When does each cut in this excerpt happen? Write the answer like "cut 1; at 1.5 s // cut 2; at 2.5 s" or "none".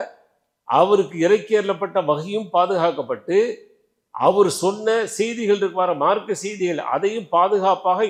none

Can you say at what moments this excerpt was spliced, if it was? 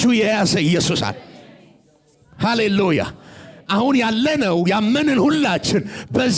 none

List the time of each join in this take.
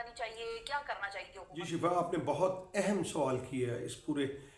cut 1; at 1.6 s

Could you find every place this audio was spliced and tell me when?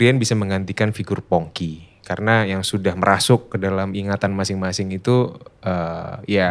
none

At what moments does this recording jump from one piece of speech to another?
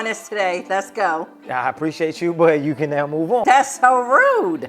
cut 1; at 3.4 s

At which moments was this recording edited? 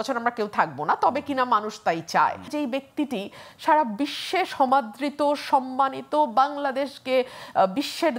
cut 1; at 2.5 s

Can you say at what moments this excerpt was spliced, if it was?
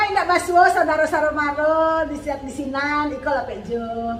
none

